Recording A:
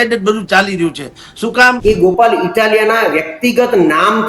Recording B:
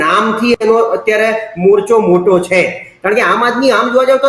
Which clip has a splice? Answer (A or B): A